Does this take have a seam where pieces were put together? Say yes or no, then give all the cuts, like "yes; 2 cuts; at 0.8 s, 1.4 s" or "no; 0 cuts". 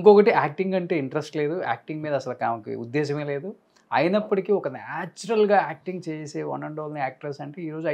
no; 0 cuts